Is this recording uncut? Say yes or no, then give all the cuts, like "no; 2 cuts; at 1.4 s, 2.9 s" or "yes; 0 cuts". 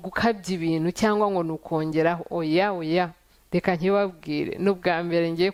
yes; 0 cuts